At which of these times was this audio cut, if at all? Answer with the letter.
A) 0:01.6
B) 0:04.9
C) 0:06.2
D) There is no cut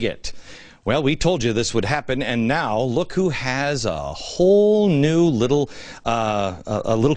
A